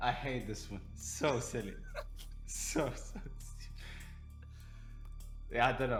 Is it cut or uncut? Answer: uncut